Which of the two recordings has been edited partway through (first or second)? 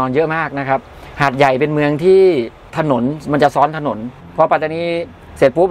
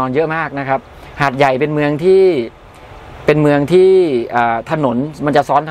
first